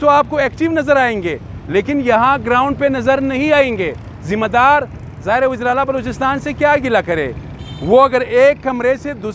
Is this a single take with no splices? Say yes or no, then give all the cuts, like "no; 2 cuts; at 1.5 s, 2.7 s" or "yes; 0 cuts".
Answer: yes; 0 cuts